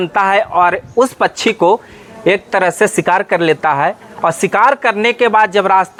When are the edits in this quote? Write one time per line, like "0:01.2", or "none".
none